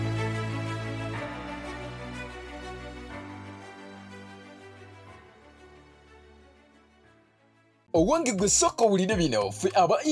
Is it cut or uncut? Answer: cut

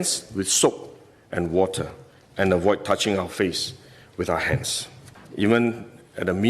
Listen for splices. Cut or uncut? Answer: cut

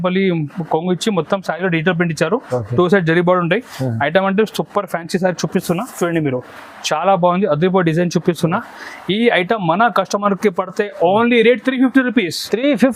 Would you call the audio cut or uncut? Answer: uncut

